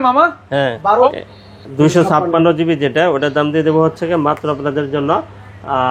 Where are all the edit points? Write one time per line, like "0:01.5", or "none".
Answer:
0:01.1